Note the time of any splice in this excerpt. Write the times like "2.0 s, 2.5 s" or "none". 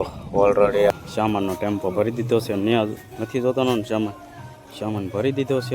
0.9 s